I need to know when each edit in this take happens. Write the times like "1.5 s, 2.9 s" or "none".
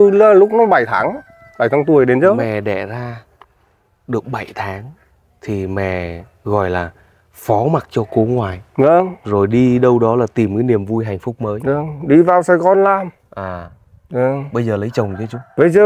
none